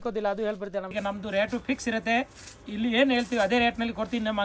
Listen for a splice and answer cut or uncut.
cut